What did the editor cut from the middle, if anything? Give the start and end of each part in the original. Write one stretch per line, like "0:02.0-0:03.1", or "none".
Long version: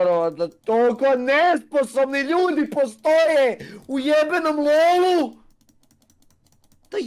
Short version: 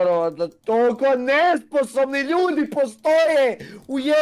none